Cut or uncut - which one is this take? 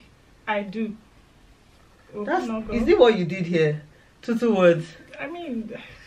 uncut